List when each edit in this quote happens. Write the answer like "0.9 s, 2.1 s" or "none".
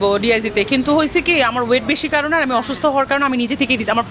none